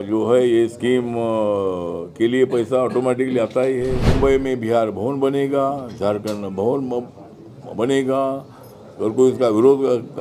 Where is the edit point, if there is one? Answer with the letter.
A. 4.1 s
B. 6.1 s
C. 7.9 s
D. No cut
A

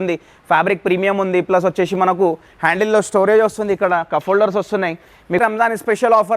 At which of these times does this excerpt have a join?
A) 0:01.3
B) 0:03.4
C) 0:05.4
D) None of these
C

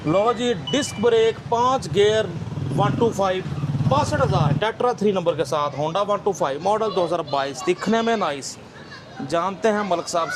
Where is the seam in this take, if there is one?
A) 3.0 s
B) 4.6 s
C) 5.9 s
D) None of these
B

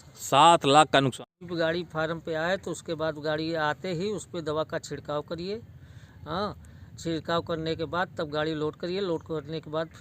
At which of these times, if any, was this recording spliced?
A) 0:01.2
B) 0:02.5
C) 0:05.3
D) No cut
A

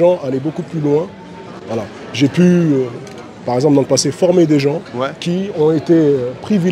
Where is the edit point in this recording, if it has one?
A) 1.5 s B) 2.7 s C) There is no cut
C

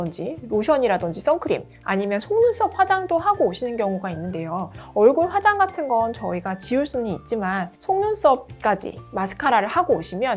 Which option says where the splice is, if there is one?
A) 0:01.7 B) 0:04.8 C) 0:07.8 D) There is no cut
D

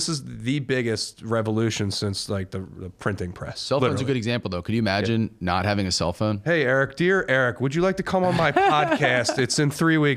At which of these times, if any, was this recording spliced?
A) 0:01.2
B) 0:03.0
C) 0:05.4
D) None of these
D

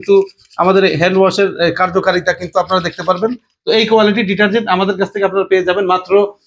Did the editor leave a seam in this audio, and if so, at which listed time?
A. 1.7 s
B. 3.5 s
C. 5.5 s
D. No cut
B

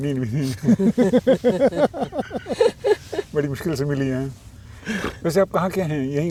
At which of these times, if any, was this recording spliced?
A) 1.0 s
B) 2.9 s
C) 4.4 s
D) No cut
D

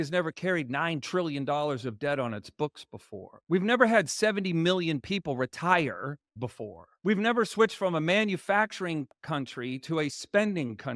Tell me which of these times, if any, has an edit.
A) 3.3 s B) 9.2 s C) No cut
B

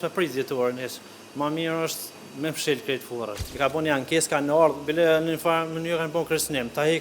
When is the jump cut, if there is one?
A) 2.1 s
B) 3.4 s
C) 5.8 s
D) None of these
B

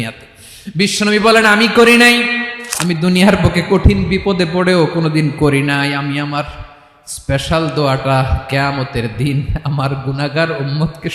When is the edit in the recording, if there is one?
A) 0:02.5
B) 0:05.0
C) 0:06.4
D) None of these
A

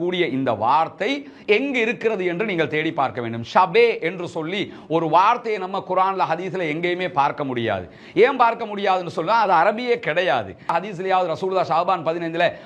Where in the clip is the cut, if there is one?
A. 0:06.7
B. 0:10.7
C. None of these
B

